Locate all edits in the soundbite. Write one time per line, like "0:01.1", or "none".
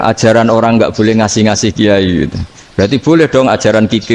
none